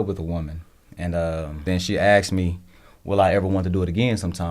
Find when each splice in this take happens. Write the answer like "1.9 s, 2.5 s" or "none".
1.7 s